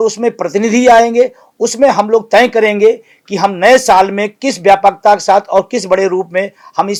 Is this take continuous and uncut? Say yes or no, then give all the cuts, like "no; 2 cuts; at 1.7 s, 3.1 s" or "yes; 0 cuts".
yes; 0 cuts